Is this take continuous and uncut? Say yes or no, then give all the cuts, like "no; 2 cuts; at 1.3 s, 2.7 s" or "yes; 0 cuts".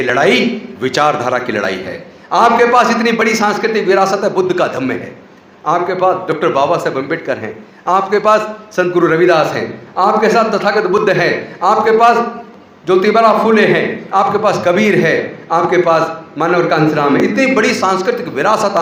yes; 0 cuts